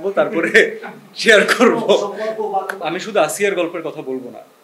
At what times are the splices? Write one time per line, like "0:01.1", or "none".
0:02.8